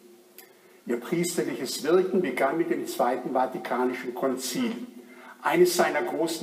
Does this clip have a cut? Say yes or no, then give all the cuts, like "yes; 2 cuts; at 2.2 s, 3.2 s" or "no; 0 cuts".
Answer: yes; 1 cut; at 1.5 s